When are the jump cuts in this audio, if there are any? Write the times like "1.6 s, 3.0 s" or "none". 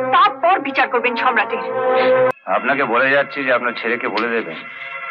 2.3 s